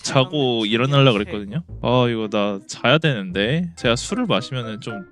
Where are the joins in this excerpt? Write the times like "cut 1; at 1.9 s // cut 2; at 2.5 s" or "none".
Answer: cut 1; at 1.7 s